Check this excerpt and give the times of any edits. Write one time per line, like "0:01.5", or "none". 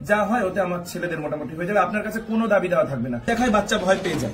0:03.3